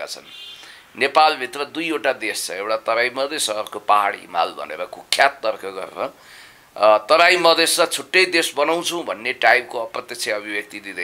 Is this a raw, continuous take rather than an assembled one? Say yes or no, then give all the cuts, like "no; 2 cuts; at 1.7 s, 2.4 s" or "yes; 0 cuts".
yes; 0 cuts